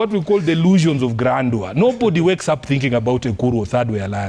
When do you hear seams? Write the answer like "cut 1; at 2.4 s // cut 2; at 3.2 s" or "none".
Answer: none